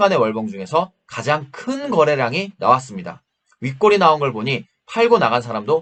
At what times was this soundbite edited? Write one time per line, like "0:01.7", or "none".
none